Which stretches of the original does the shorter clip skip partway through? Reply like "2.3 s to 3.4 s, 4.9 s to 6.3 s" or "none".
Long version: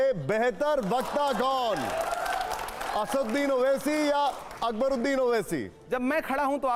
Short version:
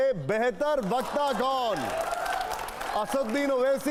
none